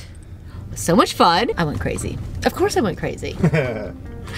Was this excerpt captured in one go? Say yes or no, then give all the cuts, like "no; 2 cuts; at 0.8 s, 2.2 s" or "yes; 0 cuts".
no; 1 cut; at 1.6 s